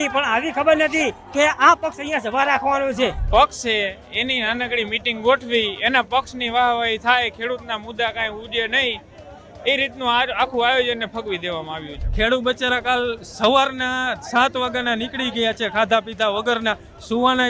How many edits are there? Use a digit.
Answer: 2